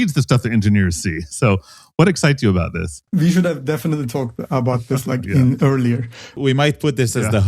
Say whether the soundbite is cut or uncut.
cut